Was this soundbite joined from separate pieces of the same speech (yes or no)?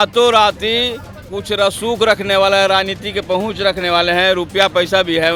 no